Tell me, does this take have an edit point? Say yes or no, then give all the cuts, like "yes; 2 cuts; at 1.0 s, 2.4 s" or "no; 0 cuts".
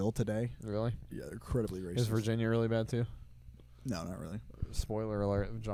no; 0 cuts